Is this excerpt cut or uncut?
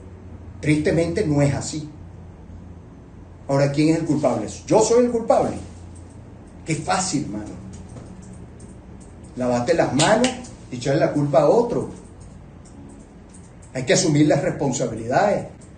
uncut